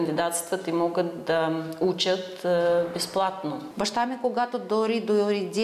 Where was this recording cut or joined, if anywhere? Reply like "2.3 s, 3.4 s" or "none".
3.6 s